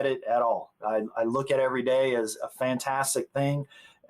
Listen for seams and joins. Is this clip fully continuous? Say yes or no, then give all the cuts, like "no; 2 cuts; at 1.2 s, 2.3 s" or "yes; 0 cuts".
no; 2 cuts; at 0.8 s, 2.3 s